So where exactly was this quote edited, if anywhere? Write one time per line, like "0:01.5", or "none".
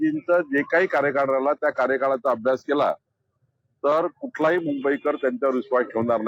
none

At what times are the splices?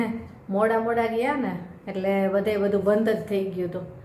none

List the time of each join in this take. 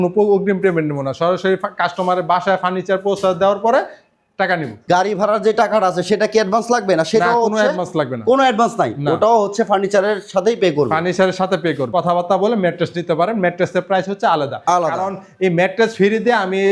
0:04.7
0:11.8

